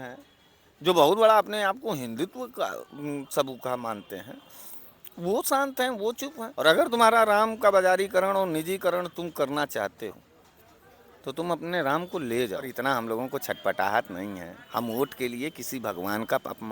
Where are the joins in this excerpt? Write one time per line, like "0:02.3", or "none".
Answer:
0:06.4
0:12.7